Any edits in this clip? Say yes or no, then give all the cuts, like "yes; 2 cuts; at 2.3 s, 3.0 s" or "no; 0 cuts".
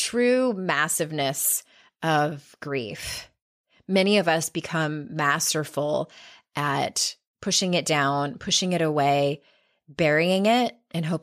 no; 0 cuts